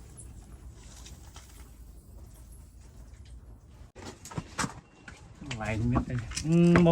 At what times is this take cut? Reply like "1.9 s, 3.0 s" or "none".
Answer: 4.0 s